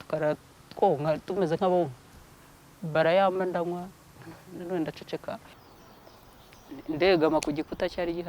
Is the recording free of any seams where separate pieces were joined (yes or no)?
no